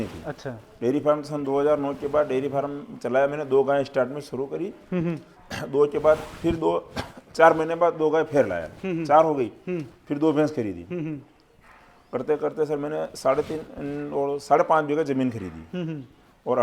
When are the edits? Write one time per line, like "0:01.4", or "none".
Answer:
none